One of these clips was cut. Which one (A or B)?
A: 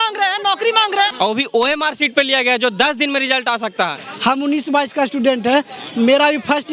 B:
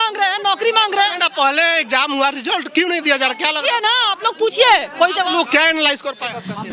A